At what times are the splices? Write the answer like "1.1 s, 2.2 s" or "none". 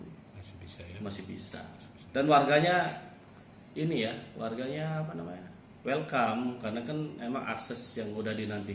none